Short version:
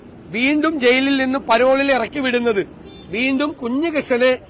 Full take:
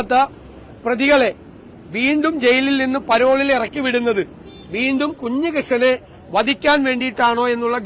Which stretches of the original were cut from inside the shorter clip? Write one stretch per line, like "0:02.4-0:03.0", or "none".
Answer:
none